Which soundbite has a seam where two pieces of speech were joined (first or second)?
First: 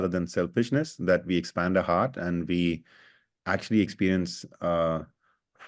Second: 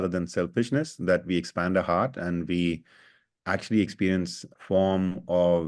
second